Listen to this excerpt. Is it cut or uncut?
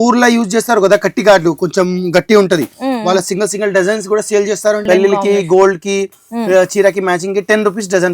cut